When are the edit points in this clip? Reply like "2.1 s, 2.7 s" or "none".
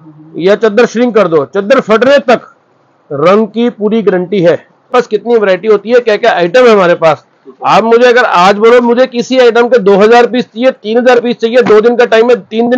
4.9 s